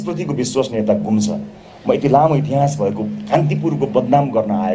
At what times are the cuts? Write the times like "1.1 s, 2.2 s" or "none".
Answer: none

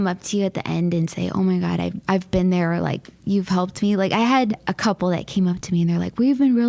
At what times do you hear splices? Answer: 2.0 s, 4.7 s

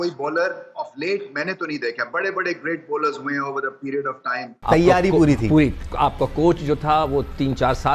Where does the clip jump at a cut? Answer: 4.5 s

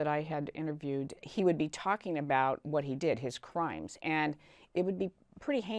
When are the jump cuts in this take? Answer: 1.2 s

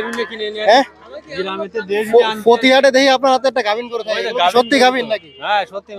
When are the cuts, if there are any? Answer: none

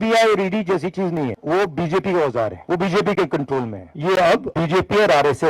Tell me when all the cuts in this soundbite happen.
1.4 s, 2.6 s, 3.8 s, 4.5 s

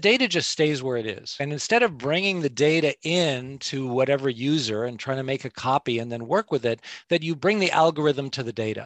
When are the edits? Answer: 7.4 s

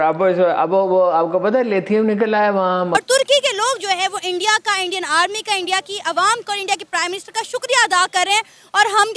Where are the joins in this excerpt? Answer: 2.9 s

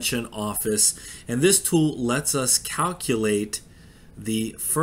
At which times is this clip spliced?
none

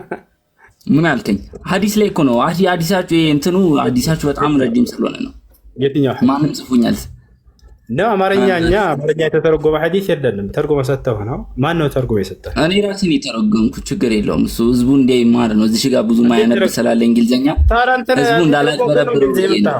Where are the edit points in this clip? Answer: none

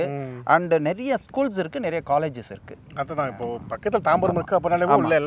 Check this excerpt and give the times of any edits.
none

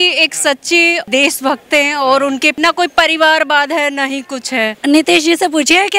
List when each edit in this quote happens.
1.1 s, 2.5 s, 4.7 s

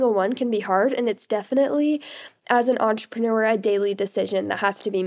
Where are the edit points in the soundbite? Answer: none

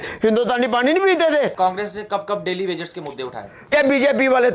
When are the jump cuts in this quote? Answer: 1.5 s, 3.7 s

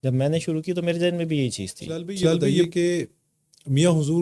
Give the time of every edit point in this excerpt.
2.1 s

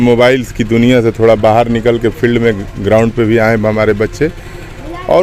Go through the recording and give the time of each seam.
none

